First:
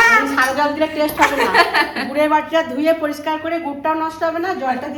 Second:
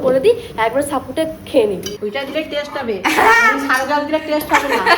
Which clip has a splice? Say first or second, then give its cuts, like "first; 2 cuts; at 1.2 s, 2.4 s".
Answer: second; 1 cut; at 2.0 s